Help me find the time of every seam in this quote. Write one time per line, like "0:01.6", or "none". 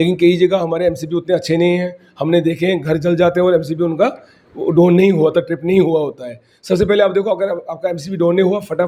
none